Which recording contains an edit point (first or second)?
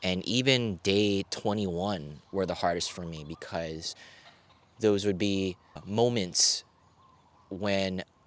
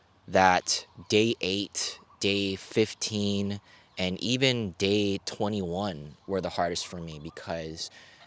first